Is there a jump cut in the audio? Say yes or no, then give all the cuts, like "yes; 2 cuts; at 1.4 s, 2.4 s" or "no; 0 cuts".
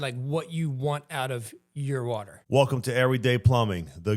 yes; 1 cut; at 2.3 s